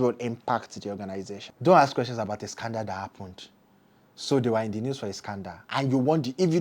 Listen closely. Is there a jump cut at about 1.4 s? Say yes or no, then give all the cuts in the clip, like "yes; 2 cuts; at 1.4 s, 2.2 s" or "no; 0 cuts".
yes; 1 cut; at 1.4 s